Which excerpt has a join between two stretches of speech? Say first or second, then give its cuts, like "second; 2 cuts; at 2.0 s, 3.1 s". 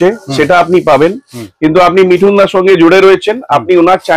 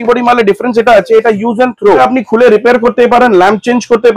second; 1 cut; at 2.0 s